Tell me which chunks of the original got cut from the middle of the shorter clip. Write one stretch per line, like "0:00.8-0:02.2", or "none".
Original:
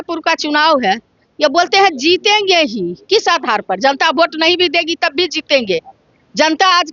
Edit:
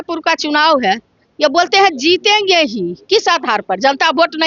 none

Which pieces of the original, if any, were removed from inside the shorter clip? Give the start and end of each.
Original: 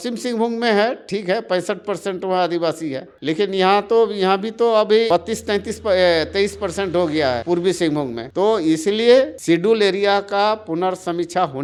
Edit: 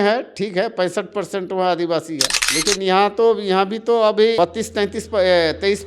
none

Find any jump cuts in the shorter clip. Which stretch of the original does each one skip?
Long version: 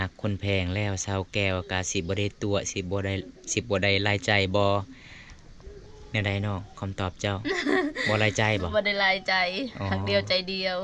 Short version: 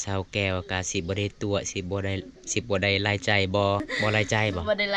0:04.9-0:08.0

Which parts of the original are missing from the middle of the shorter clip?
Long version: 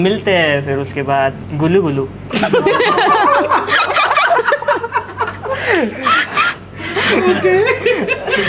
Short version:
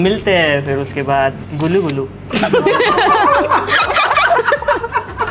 none

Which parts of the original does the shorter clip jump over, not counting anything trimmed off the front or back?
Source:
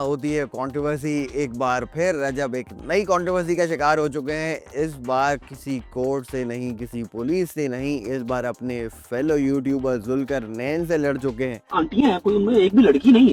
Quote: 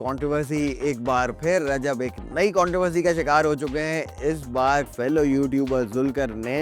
0:05.5-0:09.1

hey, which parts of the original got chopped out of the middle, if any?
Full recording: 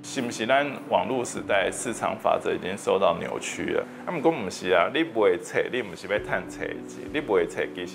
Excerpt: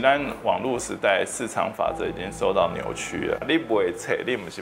0:03.9-0:04.9

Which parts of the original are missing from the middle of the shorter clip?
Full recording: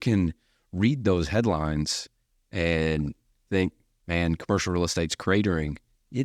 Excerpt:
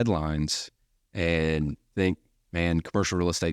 0:03.2-0:03.4

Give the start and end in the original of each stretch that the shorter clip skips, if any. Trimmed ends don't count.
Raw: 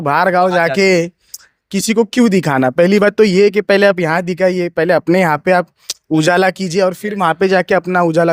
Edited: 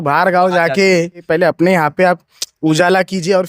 0:01.2-0:04.7

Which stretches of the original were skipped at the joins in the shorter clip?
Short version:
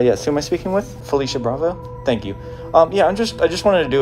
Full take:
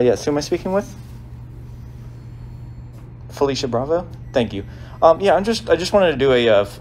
0:01.0-0:03.2

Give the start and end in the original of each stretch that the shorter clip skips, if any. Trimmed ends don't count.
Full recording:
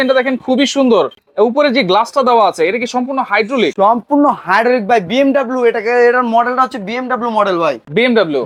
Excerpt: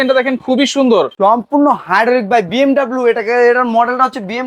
0:01.2-0:03.7

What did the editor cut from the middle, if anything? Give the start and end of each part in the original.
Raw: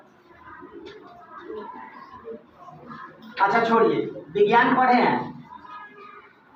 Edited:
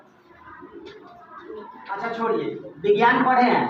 0:02.0-0:03.5

